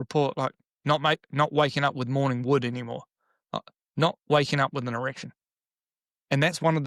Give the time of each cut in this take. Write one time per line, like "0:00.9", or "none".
none